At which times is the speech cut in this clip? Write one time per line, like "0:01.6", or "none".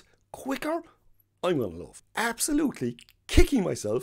0:02.0

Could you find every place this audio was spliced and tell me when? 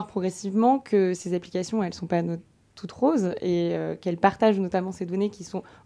none

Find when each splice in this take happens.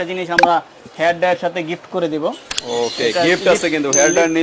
none

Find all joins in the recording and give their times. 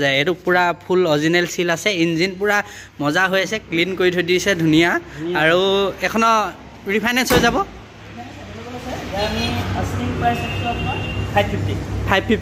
none

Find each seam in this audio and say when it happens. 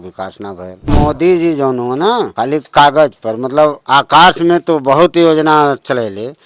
0:00.9
0:02.3
0:03.8

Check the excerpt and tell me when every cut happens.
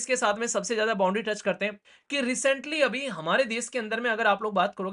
0:01.8

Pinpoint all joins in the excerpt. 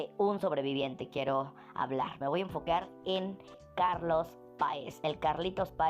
0:03.6

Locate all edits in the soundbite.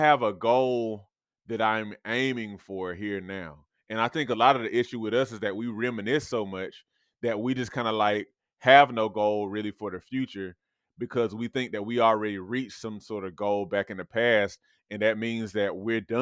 none

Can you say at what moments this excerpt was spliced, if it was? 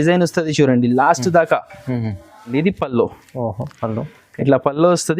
0:02.5

